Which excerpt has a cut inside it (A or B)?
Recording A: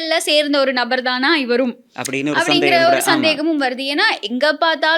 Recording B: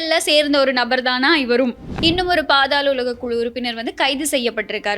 B